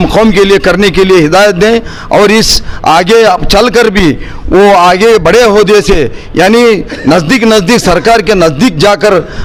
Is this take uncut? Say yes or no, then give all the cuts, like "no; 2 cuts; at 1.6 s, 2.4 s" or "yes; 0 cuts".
yes; 0 cuts